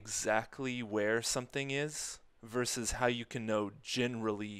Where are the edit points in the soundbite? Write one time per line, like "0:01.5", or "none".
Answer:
none